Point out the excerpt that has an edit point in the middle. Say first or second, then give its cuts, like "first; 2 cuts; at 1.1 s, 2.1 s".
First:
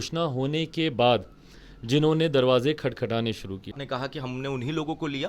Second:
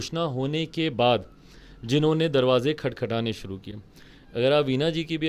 first; 1 cut; at 3.8 s